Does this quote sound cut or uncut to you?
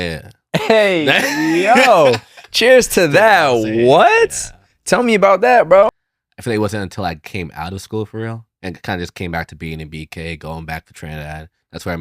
cut